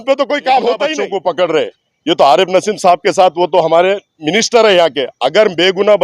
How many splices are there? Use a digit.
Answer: 2